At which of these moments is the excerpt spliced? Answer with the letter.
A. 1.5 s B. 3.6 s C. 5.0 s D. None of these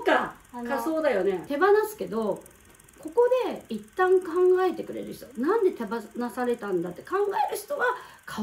A